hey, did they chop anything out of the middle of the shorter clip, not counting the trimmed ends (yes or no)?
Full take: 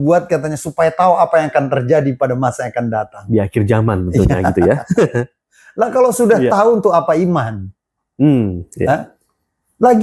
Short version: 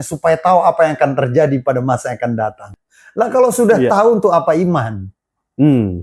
yes